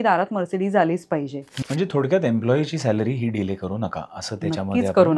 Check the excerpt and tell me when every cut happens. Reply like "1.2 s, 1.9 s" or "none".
1.4 s